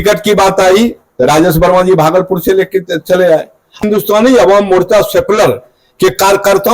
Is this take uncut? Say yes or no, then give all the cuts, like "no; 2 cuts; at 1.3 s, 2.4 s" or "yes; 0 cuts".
no; 1 cut; at 3.8 s